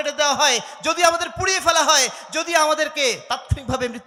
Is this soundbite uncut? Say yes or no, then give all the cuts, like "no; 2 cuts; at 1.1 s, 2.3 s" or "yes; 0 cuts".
yes; 0 cuts